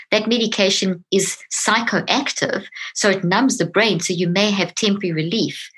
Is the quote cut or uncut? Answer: cut